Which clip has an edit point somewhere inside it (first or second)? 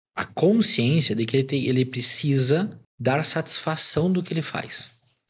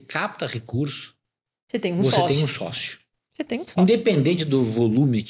first